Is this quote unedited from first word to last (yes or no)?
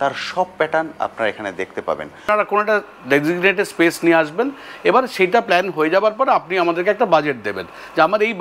no